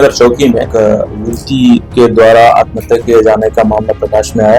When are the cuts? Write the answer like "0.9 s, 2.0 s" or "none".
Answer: 1.1 s